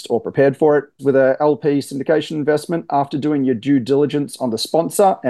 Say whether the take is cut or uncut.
cut